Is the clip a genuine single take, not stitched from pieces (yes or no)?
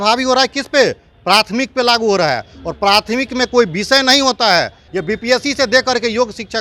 no